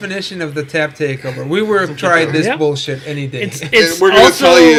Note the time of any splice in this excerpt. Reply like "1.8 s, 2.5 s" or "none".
none